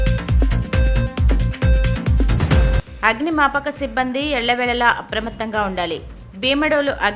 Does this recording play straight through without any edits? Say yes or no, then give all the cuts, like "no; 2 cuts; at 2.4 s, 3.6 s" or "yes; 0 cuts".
yes; 0 cuts